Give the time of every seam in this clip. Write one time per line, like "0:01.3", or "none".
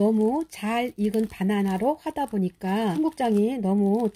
0:02.9